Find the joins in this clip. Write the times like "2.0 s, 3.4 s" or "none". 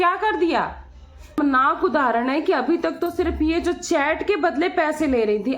1.4 s